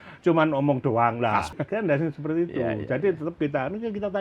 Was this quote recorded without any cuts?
no; 1 cut; at 1.4 s

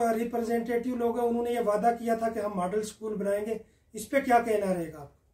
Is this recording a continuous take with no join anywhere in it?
yes; 0 cuts

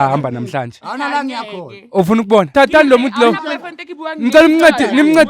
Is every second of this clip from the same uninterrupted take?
no; 1 cut; at 2.5 s

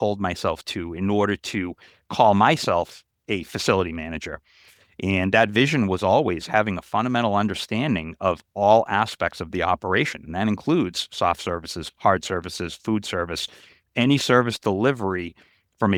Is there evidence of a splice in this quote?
no; 0 cuts

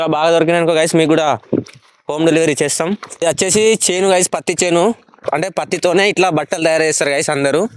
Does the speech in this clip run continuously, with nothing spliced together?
no; 2 cuts; at 3.2 s, 5.2 s

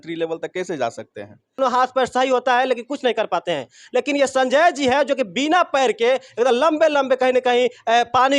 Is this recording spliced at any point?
yes; 1 cut; at 1.6 s

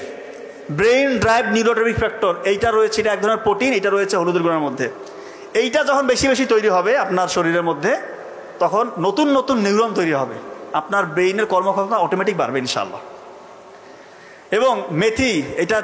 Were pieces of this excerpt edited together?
no; 0 cuts

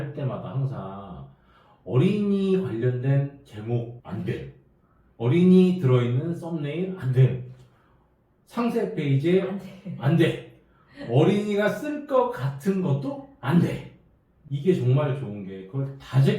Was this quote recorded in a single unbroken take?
yes; 0 cuts

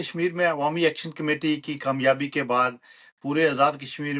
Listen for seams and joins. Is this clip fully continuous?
yes; 0 cuts

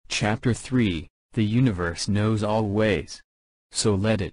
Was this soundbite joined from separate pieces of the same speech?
no; 0 cuts

